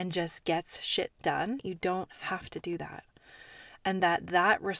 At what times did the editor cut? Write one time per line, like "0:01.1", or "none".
0:01.6